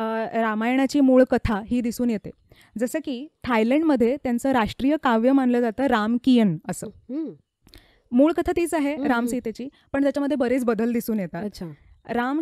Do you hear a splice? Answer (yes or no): no